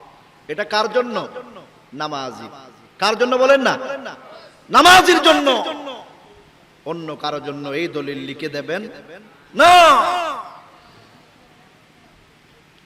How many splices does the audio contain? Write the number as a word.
zero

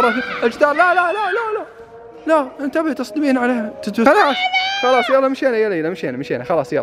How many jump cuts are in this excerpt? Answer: one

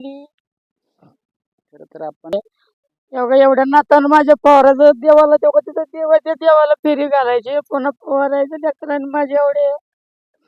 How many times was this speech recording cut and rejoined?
one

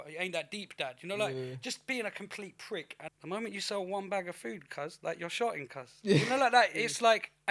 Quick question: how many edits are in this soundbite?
one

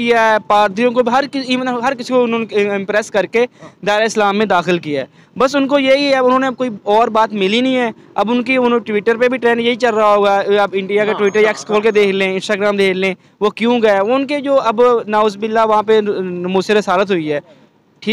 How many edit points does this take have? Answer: zero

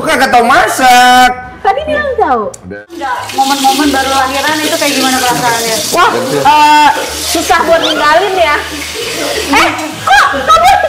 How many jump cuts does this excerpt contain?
one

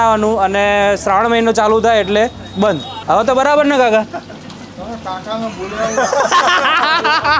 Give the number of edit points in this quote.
one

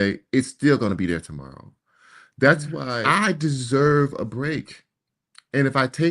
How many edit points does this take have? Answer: one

